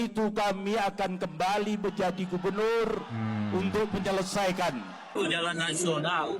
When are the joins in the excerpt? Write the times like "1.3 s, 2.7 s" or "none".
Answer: 5.2 s